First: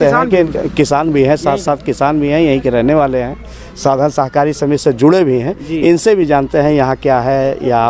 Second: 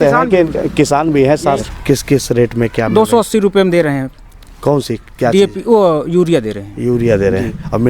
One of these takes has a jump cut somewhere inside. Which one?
second; 1 cut; at 1.6 s

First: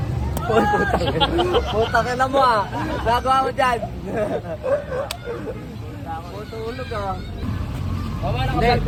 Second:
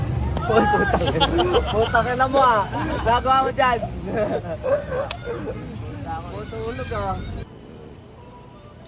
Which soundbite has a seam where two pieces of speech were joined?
second; 1 cut; at 7.4 s

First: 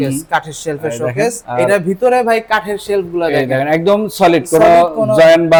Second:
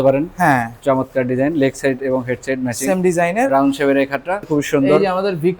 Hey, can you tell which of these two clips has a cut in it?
second; 1 cut; at 4.4 s

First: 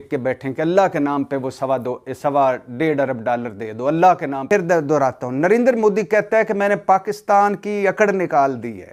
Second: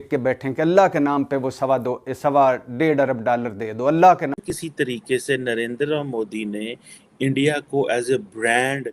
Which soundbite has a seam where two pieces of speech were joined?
second; 1 cut; at 4.4 s

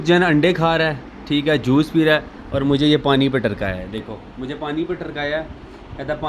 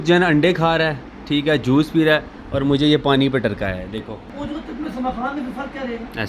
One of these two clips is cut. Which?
second; 1 cut; at 4.3 s

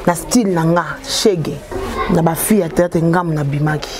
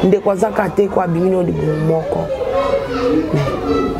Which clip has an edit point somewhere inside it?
first; 1 cut; at 1.7 s

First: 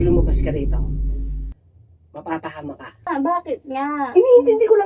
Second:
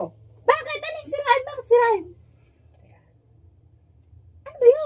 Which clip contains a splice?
first; 1 cut; at 3.1 s

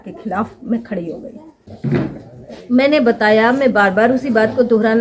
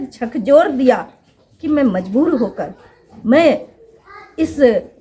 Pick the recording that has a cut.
first; 1 cut; at 1.7 s

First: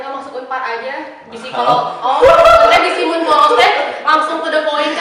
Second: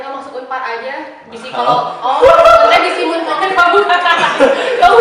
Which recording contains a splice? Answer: second; 1 cut; at 3.3 s

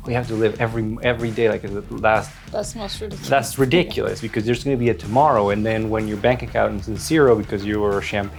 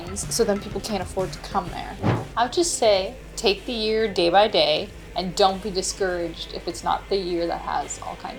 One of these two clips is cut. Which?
second; 3 cuts; at 2.0 s, 3.2 s, 5.0 s

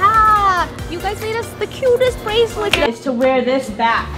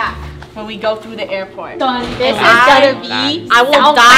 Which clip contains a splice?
first; 1 cut; at 2.9 s

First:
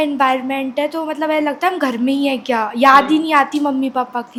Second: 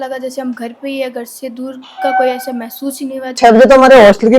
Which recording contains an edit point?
second; 1 cut; at 3.4 s

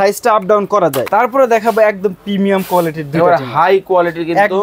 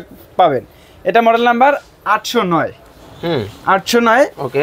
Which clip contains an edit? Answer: first; 1 cut; at 1.1 s

